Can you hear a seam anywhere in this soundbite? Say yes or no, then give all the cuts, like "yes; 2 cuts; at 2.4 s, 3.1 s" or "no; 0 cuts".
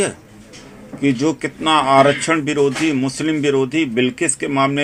no; 0 cuts